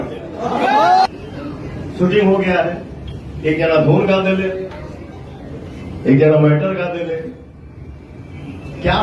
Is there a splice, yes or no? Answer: yes